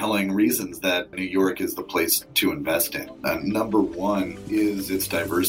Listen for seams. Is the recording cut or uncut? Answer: cut